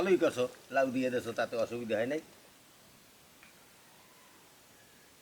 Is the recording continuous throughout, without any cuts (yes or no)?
no